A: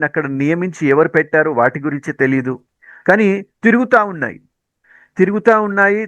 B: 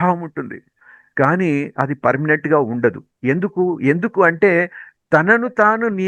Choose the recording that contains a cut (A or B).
A